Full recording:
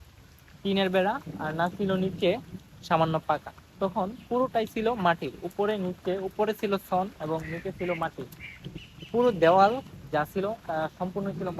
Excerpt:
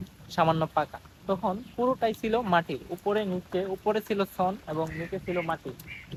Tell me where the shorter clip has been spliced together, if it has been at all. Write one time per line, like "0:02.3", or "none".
none